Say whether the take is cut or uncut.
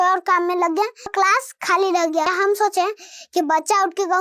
cut